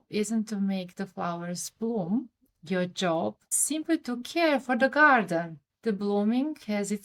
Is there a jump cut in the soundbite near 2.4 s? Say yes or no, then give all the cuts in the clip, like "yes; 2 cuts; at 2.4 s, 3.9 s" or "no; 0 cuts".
no; 0 cuts